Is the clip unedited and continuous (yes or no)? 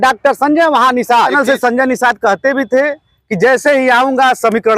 no